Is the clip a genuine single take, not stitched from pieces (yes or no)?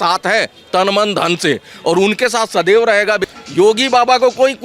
no